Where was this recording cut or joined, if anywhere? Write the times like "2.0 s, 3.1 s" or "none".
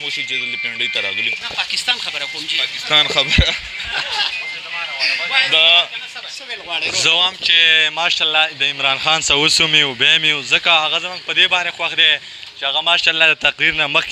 6.5 s